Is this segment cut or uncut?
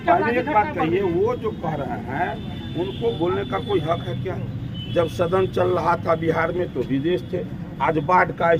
uncut